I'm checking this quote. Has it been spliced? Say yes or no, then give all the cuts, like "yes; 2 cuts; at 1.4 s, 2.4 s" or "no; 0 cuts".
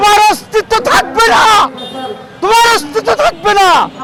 no; 0 cuts